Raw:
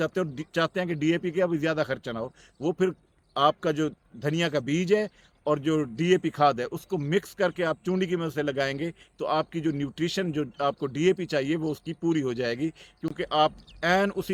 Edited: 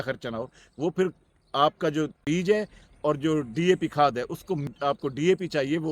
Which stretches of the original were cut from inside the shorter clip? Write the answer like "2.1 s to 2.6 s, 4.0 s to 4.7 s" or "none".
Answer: 4.1 s to 4.7 s, 7.1 s to 10.5 s